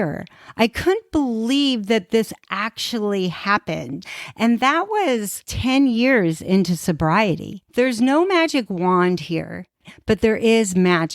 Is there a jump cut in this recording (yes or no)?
yes